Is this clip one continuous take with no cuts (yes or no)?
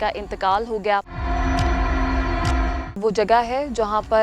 no